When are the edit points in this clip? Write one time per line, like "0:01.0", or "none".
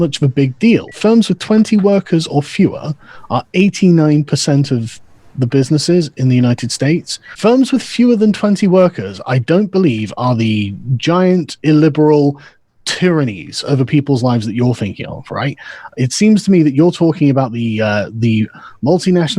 0:00.9
0:07.2